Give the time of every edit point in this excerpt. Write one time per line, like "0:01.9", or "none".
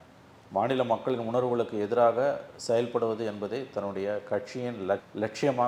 none